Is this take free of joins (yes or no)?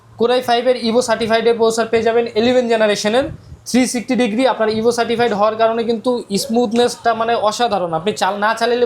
yes